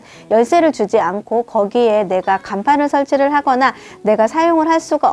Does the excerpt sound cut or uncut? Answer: uncut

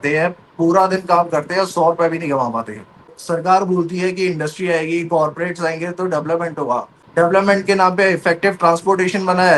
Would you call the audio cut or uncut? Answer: cut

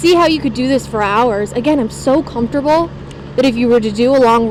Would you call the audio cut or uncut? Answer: uncut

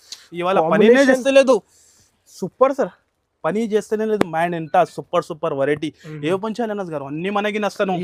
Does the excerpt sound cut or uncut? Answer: uncut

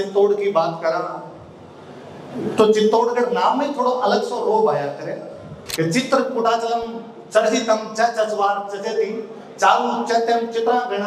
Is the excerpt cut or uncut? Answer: cut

